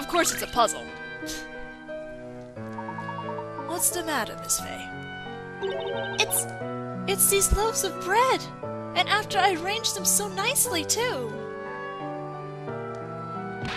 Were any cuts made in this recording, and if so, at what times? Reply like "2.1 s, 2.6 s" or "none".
1.1 s